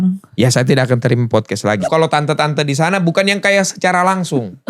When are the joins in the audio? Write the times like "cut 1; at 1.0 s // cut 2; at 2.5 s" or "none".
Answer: cut 1; at 1.8 s